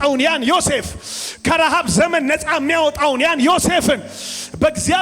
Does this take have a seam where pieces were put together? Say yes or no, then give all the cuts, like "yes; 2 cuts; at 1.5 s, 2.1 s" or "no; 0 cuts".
no; 0 cuts